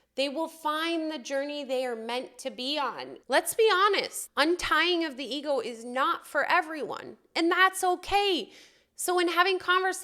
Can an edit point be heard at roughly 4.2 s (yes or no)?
yes